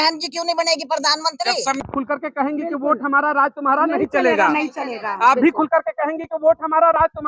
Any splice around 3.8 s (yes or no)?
no